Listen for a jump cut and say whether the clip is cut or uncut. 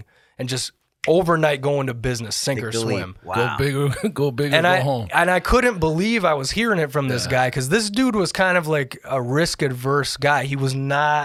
uncut